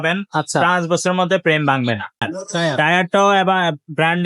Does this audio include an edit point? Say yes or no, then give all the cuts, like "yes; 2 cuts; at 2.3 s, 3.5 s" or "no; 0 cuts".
yes; 1 cut; at 2.3 s